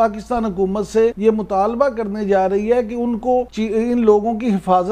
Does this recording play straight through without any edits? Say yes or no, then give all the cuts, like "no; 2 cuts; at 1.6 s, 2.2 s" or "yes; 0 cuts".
no; 2 cuts; at 1.2 s, 3.5 s